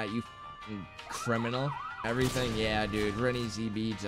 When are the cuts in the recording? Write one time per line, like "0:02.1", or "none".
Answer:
0:02.0